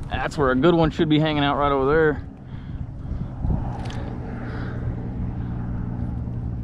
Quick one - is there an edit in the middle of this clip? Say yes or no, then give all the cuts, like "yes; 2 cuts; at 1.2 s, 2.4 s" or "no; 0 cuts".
no; 0 cuts